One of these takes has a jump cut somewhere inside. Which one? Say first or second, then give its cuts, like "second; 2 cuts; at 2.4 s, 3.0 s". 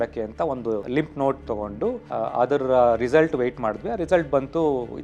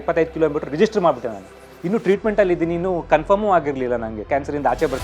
first; 2 cuts; at 0.8 s, 2.0 s